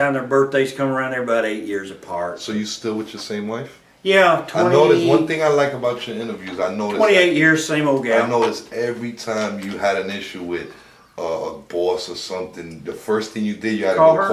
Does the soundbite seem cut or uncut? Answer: cut